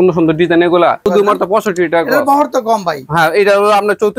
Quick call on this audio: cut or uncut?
cut